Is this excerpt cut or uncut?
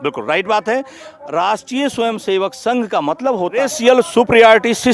cut